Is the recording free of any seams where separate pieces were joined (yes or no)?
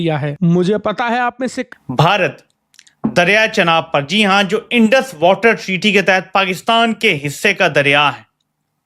no